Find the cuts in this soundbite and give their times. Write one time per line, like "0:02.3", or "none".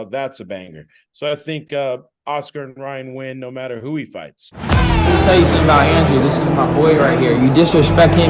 0:04.4